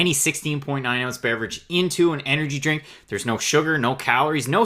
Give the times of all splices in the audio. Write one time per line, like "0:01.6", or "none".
none